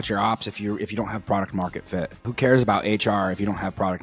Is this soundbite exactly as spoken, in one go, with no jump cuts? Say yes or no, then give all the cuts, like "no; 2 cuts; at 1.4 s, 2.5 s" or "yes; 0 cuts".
no; 1 cut; at 2.3 s